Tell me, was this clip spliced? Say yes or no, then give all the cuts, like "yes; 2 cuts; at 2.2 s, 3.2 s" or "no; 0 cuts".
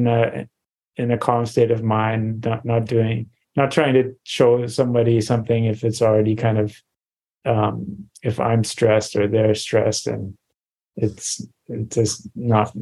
no; 0 cuts